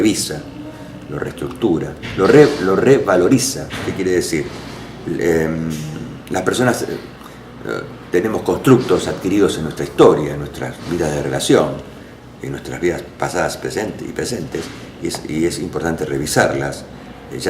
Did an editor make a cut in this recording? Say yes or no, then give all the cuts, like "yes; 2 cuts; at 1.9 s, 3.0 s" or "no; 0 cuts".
yes; 1 cut; at 14.8 s